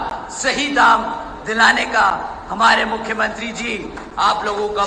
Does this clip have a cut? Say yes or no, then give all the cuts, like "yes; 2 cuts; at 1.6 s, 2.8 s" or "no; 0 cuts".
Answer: no; 0 cuts